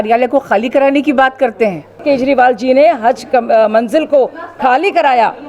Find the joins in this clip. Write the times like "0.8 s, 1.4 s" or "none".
2.0 s